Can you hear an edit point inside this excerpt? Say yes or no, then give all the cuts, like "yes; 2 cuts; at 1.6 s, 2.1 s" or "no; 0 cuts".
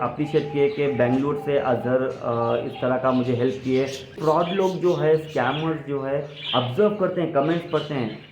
yes; 1 cut; at 4.2 s